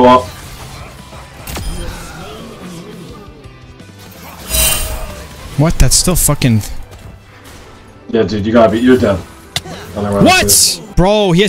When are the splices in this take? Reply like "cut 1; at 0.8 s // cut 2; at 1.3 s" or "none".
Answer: none